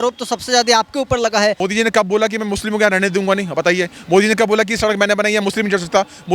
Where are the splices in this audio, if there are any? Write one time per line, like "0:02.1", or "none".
0:01.6